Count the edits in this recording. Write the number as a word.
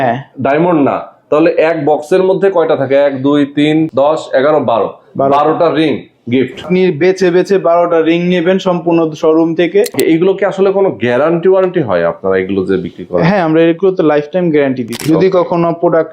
four